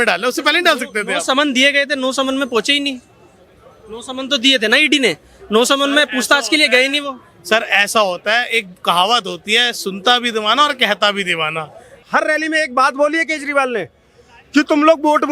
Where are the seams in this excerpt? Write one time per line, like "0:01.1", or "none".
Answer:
0:12.0